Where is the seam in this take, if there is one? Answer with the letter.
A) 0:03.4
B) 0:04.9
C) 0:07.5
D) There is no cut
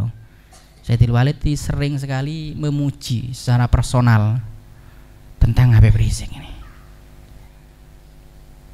C